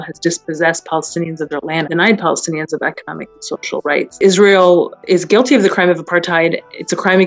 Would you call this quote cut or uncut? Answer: cut